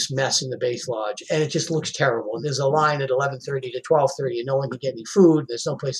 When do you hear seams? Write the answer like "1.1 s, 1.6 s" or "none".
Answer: 1.2 s, 2.4 s

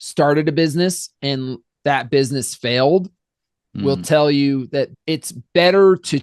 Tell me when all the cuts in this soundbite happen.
1.6 s, 4.9 s

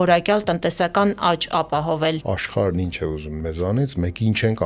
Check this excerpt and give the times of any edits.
2.2 s

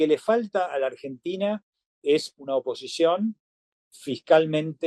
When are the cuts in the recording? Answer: none

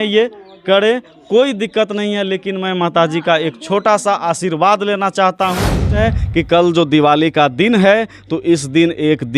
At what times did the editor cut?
5.9 s

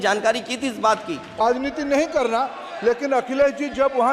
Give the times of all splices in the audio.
1.4 s

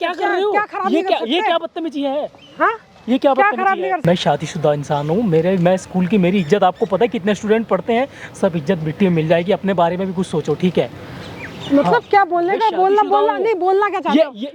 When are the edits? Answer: none

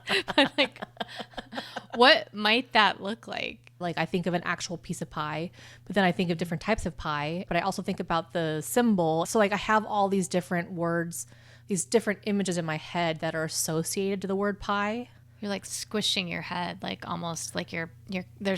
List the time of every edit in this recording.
3.8 s, 7.5 s, 9.3 s, 15.1 s

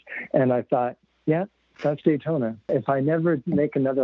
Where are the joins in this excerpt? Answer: 1.1 s, 2.7 s

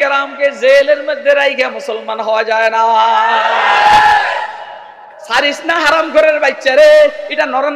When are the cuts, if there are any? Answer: 5.2 s

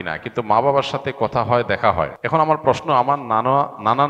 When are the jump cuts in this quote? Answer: 2.2 s

